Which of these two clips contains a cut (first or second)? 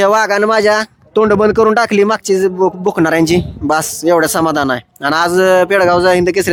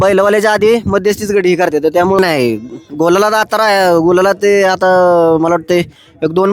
second